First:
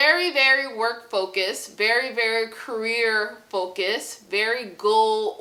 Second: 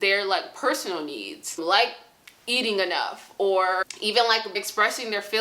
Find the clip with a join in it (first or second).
second